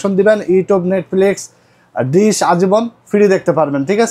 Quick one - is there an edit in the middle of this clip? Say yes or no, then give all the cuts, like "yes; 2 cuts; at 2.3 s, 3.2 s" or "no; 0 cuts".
no; 0 cuts